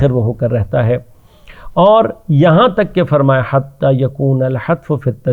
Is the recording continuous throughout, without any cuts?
yes; 0 cuts

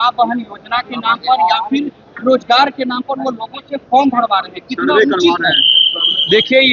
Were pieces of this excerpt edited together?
no; 0 cuts

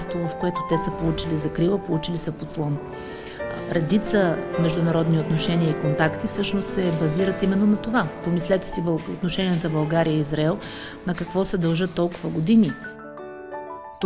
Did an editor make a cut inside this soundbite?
no; 0 cuts

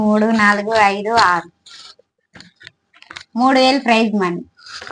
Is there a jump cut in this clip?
no; 0 cuts

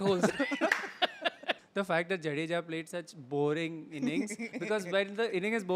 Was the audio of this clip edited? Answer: yes; 1 cut; at 1.6 s

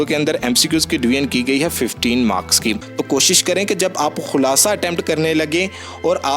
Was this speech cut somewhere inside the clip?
yes; 1 cut; at 2.9 s

